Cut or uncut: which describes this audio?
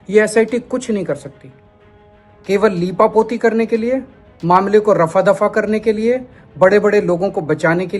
uncut